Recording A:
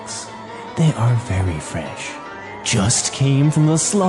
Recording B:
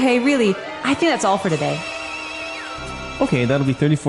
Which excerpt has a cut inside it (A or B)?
B